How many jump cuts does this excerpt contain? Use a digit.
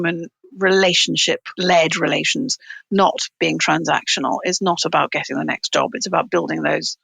1